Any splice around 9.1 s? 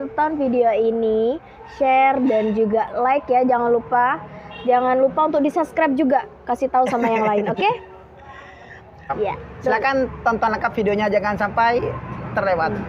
yes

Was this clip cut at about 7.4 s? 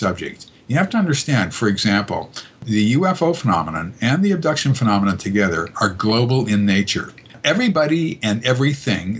yes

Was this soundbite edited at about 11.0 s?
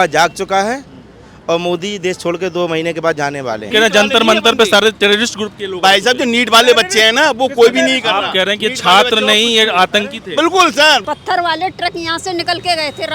yes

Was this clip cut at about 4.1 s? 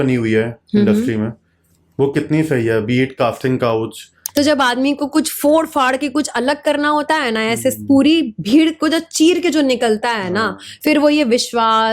yes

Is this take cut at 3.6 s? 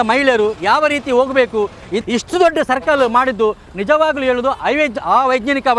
no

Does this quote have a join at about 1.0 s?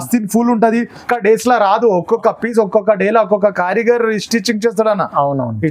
yes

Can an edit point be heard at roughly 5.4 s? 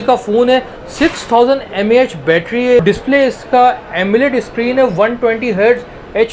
no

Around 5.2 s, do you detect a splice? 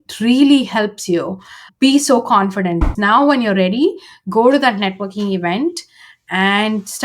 no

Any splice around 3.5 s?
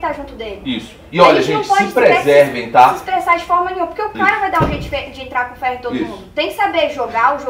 no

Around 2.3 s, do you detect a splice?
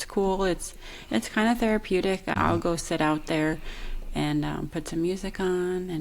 yes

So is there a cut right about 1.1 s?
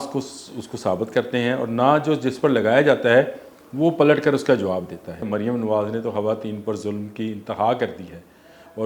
no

